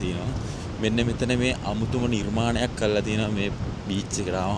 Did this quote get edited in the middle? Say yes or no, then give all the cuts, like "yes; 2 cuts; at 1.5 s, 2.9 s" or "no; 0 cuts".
no; 0 cuts